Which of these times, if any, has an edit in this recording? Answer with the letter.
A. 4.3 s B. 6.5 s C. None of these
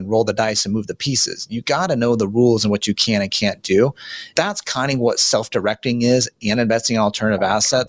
A